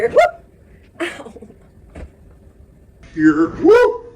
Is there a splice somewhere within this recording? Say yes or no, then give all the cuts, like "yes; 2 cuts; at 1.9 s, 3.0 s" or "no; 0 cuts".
yes; 1 cut; at 3.0 s